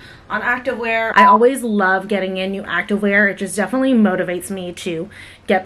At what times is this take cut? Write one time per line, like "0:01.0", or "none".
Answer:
0:01.1

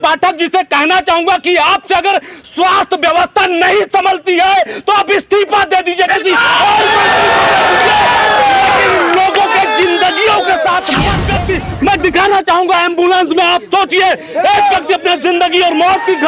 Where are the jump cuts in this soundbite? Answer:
0:11.2

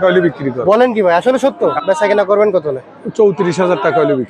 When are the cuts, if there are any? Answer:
0:01.7

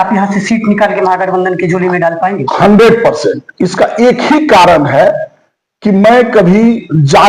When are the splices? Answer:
none

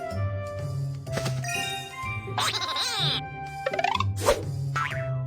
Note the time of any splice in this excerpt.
none

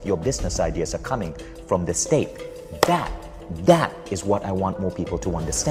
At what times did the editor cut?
none

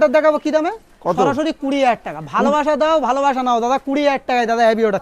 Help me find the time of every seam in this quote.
none

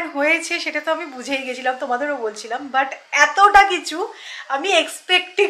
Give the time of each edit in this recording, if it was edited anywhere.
none

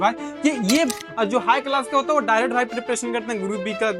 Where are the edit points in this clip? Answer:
0:01.0

